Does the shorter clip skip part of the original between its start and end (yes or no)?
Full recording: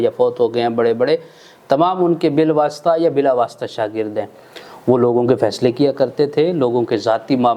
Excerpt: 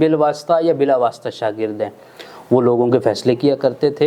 no